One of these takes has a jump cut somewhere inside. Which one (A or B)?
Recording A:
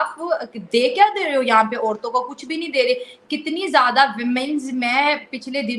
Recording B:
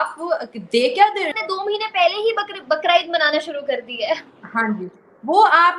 B